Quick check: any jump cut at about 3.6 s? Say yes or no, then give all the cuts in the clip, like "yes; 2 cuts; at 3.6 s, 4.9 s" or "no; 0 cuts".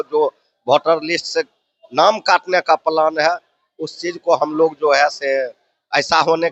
no; 0 cuts